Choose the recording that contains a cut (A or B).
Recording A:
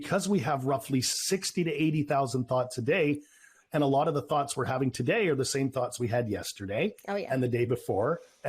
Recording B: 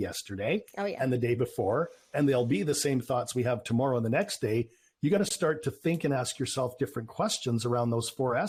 A